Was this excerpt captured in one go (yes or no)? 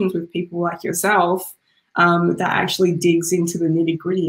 yes